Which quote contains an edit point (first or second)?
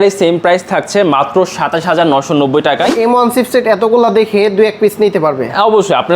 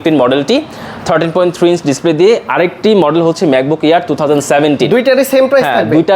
first